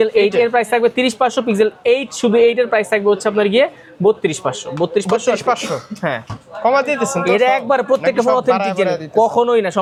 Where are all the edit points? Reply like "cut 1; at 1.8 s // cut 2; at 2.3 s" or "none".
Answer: none